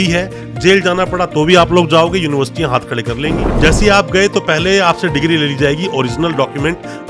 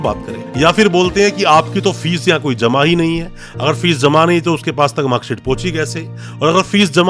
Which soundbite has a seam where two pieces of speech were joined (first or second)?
first